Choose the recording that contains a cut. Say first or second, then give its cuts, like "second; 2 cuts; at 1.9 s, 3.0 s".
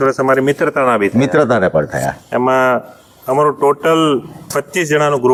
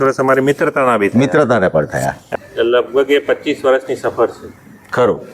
second; 1 cut; at 2.2 s